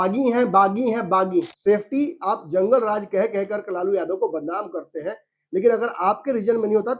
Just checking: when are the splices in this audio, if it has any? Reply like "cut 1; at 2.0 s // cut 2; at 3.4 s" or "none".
cut 1; at 1.5 s